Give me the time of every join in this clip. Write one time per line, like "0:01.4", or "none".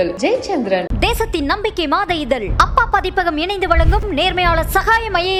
none